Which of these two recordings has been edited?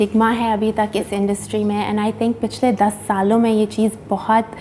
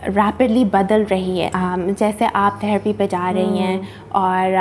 second; 1 cut; at 1.5 s

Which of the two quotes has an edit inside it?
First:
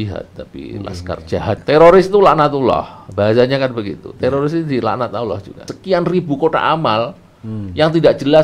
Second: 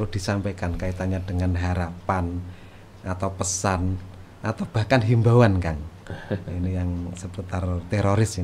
first; 2 cuts; at 1.6 s, 5.8 s

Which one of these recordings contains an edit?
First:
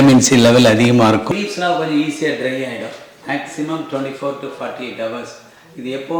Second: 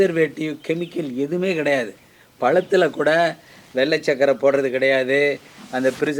first; 1 cut; at 1.2 s

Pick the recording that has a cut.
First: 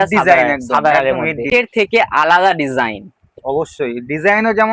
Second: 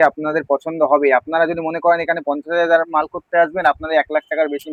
first; 1 cut; at 1.5 s

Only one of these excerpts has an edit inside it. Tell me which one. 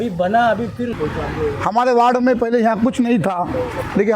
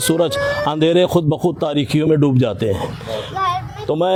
first; 1 cut; at 0.9 s

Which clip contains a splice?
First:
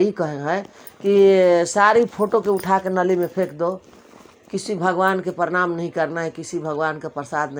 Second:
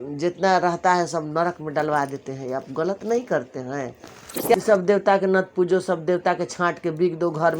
second; 1 cut; at 4.5 s

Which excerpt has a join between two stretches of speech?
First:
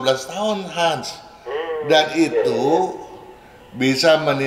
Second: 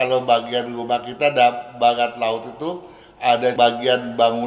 second; 1 cut; at 3.5 s

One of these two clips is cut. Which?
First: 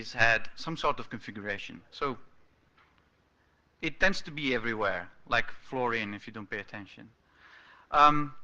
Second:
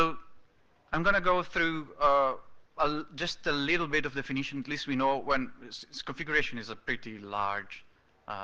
first; 1 cut; at 5.9 s

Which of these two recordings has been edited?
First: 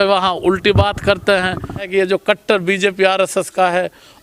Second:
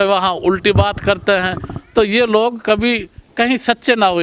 first; 1 cut; at 1.8 s

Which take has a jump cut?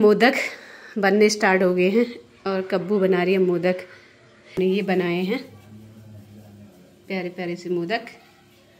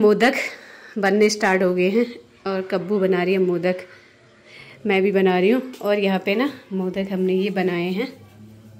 first; 1 cut; at 4.6 s

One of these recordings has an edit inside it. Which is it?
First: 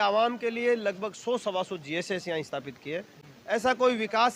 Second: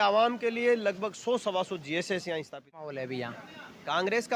second; 1 cut; at 2.9 s

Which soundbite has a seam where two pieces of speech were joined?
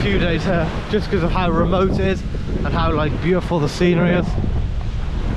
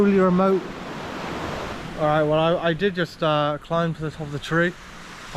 second; 1 cut; at 1.7 s

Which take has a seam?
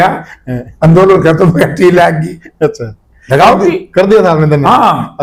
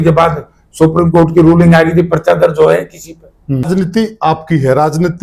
second; 1 cut; at 3.7 s

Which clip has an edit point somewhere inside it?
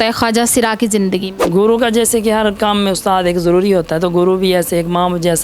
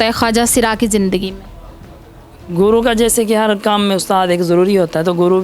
first; 1 cut; at 1.4 s

